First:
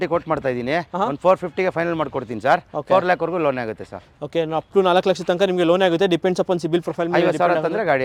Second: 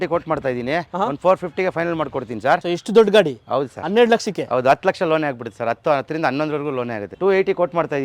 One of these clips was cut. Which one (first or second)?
second